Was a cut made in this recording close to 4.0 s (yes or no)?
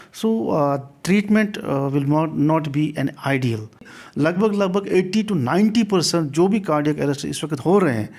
yes